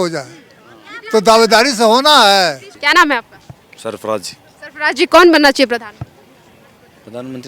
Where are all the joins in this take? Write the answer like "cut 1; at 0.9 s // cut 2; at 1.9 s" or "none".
cut 1; at 2.8 s